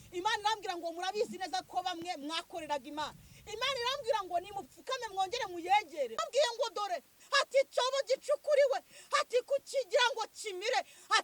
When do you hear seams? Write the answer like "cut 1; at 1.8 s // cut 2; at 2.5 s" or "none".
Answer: cut 1; at 6.2 s